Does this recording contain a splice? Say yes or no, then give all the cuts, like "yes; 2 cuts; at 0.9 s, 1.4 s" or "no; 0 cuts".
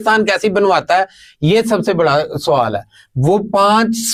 no; 0 cuts